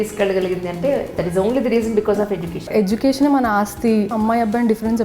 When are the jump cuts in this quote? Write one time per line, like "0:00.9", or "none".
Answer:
0:02.6
0:04.1